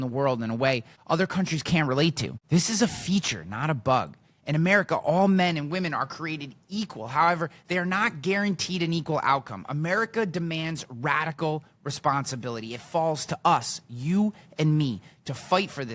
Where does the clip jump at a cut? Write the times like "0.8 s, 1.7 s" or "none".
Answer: 0.9 s